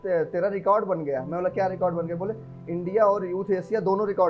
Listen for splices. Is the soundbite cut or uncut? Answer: uncut